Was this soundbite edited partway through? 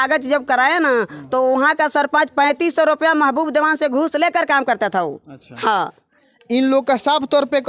no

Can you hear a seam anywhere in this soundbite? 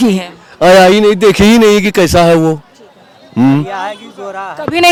no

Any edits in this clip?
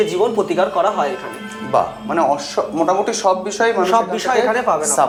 no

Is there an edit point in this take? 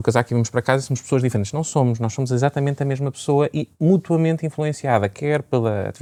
no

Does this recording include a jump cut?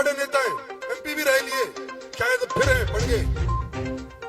no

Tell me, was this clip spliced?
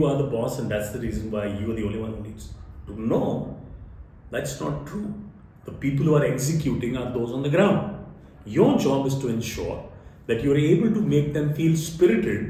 no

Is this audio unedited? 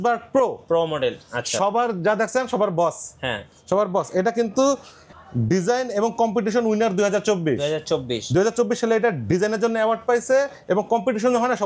yes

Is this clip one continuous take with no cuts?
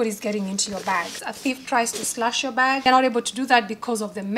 no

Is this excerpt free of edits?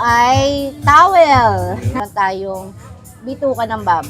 no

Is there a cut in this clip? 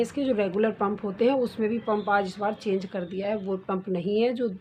no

